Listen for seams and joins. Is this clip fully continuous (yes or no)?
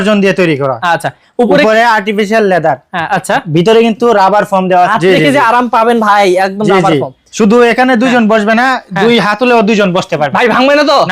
no